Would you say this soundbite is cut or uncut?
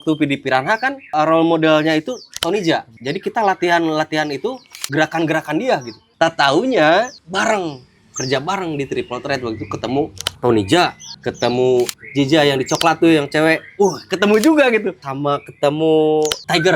cut